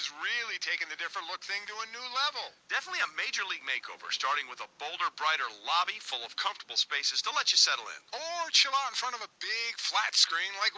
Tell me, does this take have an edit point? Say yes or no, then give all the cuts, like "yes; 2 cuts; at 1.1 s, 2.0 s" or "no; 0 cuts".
yes; 1 cut; at 6.1 s